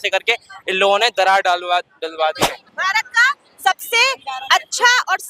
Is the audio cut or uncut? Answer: cut